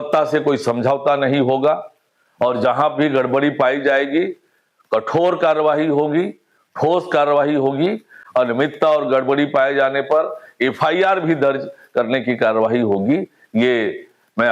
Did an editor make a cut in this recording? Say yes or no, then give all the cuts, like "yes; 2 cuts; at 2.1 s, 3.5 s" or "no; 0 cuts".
no; 0 cuts